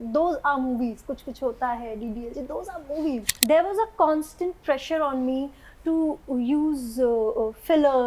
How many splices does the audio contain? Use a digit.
1